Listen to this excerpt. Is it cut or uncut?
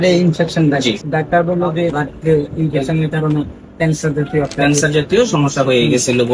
cut